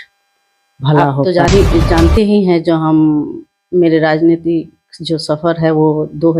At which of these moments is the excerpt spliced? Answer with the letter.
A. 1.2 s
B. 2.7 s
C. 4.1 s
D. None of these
A